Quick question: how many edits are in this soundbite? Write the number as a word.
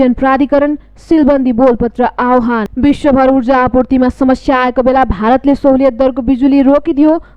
one